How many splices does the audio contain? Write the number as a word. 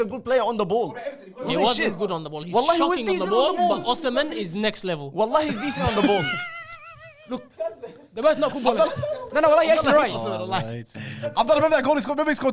zero